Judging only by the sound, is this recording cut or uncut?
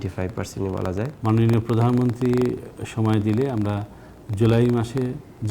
cut